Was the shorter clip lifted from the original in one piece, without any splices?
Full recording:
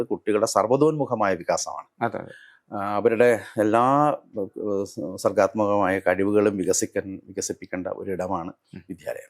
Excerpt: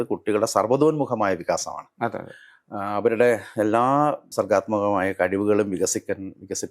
no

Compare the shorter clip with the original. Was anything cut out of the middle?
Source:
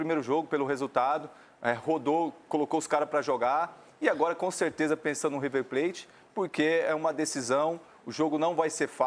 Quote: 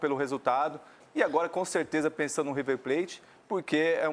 yes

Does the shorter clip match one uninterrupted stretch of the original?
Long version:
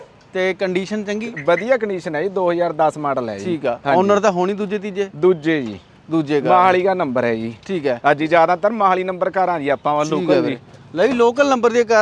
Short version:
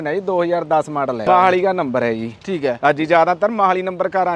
no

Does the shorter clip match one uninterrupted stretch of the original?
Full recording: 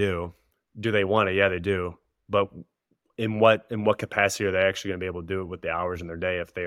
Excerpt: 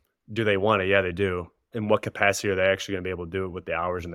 no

